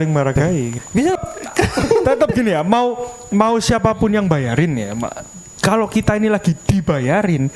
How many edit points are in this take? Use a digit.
1